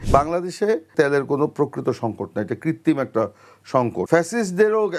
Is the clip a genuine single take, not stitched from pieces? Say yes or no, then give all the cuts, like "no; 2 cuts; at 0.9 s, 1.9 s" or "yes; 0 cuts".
no; 2 cuts; at 0.9 s, 4.0 s